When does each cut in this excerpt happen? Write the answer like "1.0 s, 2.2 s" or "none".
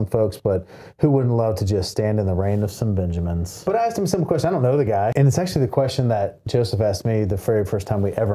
3.6 s, 5.1 s